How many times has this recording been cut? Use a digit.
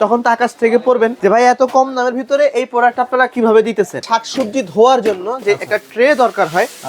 2